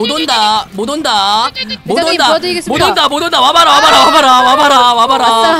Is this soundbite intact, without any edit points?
yes; 0 cuts

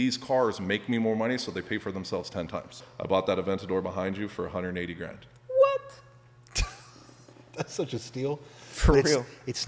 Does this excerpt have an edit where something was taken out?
yes; 1 cut; at 2.8 s

